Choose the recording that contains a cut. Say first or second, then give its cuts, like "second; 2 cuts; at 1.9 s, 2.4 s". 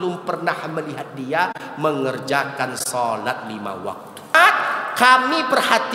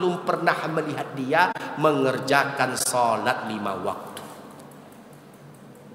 first; 1 cut; at 4.3 s